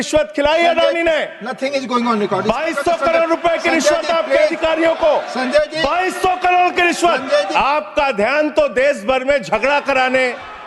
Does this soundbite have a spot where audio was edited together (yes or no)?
yes